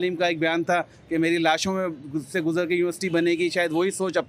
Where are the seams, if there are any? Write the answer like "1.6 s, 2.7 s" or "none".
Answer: none